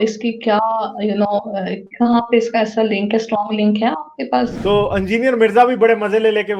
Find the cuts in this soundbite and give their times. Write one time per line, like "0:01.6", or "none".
0:04.6